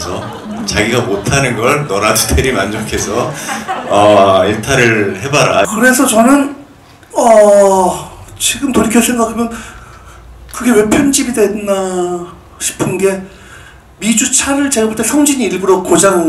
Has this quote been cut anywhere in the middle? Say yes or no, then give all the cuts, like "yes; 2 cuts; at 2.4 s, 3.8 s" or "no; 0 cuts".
yes; 1 cut; at 5.7 s